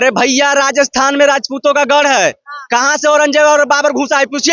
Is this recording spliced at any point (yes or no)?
no